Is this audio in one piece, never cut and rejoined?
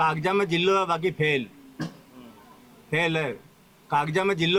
yes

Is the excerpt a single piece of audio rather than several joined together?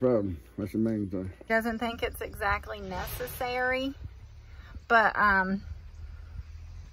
no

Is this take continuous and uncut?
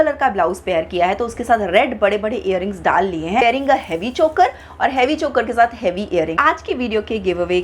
no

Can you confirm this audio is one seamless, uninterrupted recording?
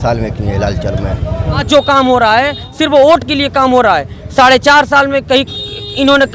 no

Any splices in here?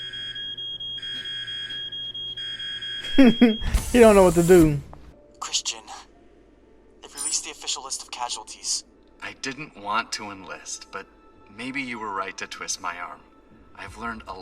yes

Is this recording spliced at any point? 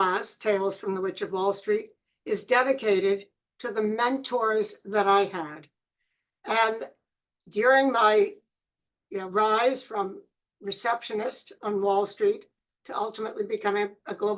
no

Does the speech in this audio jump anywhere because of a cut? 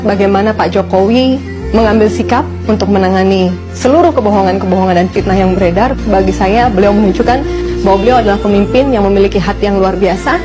no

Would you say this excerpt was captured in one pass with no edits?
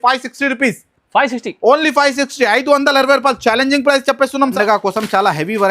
no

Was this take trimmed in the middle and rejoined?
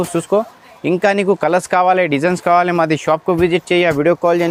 no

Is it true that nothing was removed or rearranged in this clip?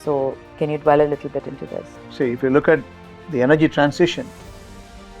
no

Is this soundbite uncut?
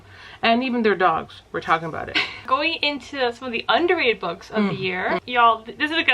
no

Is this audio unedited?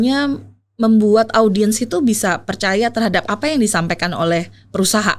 yes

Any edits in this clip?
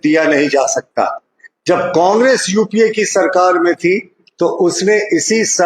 no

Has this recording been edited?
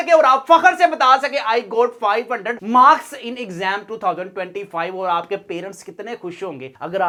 no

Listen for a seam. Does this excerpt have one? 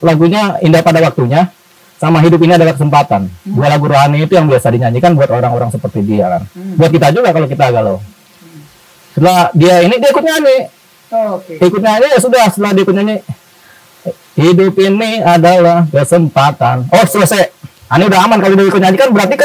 no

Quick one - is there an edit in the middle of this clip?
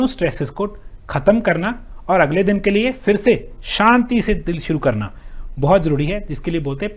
no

